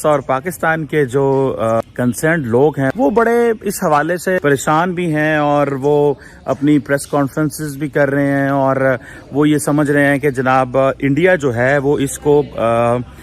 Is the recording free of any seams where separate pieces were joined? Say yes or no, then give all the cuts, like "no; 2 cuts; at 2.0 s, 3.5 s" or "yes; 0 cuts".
no; 3 cuts; at 1.8 s, 2.9 s, 4.4 s